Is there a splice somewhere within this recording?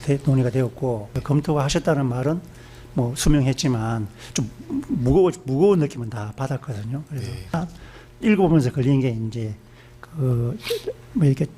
yes; 2 cuts; at 1.2 s, 7.5 s

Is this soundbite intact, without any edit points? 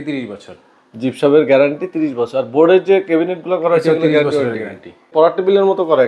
no; 1 cut; at 5.0 s

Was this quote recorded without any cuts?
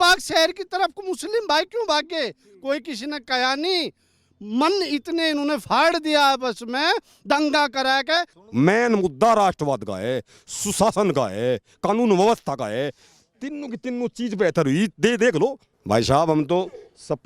no; 2 cuts; at 8.4 s, 15.7 s

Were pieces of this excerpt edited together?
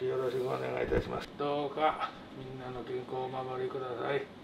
yes; 1 cut; at 1.3 s

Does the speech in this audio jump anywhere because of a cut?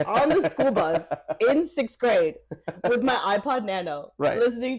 no; 0 cuts

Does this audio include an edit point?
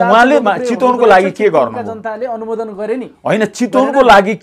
no; 0 cuts

